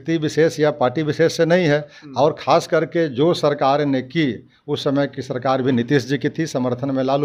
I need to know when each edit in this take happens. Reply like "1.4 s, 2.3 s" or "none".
none